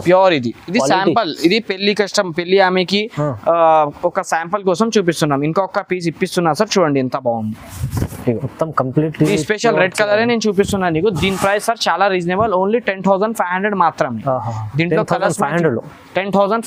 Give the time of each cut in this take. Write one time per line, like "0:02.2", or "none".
none

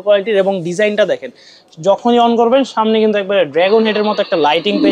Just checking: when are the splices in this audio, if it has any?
none

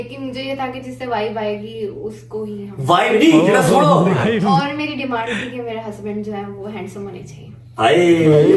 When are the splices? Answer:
none

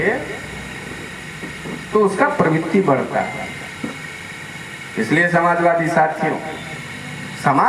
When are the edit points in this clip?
none

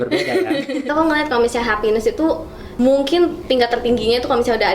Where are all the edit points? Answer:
0:00.9
0:02.6

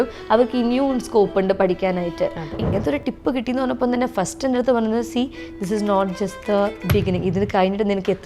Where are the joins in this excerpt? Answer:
0:02.6

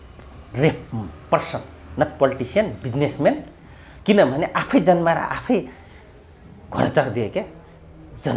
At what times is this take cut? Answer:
none

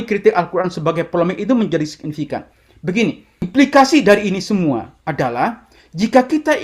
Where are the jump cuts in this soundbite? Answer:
0:03.4

